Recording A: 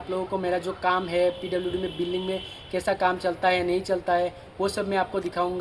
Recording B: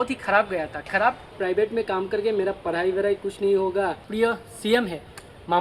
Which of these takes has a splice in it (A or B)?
B